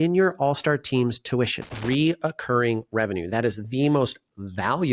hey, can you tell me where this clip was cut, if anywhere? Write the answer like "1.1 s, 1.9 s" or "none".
1.7 s